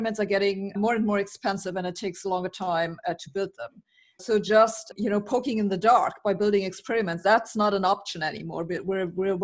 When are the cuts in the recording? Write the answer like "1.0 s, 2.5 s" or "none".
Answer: 0.8 s, 4.2 s, 4.8 s